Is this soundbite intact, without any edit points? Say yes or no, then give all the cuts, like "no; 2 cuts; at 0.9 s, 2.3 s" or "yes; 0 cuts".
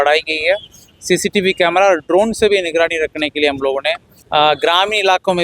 no; 1 cut; at 4.1 s